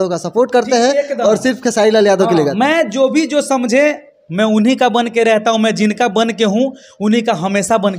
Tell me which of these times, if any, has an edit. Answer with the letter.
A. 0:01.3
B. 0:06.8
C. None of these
C